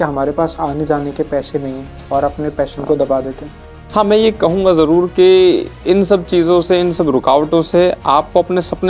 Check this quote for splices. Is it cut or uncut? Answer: uncut